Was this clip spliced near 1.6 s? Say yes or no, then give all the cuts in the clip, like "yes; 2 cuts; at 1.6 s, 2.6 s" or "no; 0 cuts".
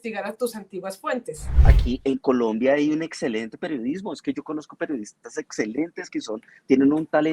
yes; 1 cut; at 1.6 s